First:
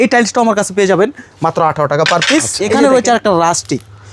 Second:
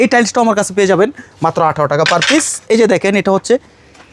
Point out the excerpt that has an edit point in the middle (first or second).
first